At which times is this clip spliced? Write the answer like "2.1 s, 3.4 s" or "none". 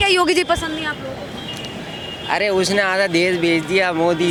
none